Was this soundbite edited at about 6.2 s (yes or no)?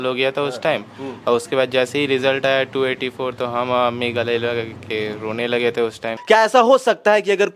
yes